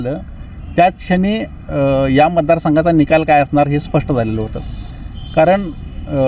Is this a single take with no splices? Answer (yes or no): yes